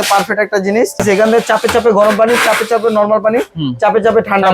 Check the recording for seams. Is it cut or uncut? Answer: cut